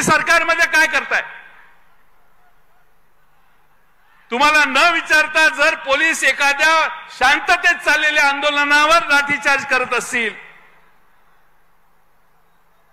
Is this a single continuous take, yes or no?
yes